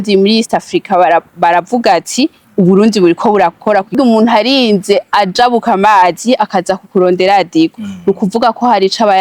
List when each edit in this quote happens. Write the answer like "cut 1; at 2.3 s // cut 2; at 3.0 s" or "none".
cut 1; at 3.9 s